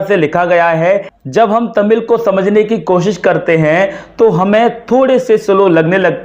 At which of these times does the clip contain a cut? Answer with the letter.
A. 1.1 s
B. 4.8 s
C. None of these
A